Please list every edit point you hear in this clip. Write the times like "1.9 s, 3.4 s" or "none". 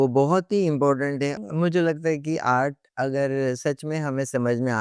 1.4 s